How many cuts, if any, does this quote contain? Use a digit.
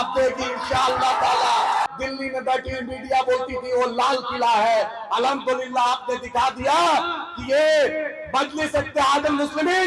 1